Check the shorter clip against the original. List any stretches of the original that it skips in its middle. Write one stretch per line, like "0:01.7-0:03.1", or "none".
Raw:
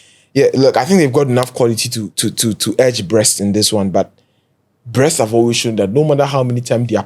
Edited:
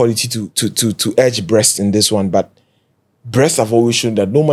none